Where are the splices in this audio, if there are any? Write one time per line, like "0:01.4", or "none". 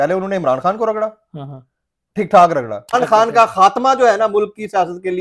0:02.9